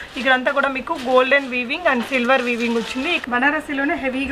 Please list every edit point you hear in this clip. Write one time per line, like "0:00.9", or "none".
0:03.2